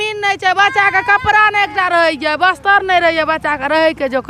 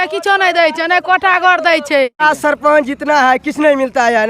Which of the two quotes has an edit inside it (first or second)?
second